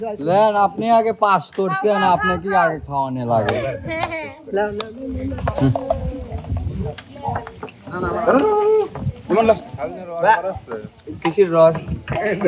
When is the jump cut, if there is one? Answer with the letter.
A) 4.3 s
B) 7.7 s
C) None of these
C